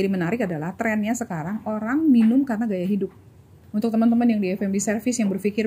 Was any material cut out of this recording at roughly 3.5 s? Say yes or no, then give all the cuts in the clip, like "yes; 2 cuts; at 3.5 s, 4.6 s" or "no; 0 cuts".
yes; 1 cut; at 3.5 s